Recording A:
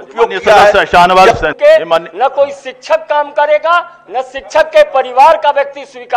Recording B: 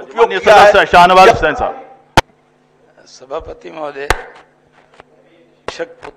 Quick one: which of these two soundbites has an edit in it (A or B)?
A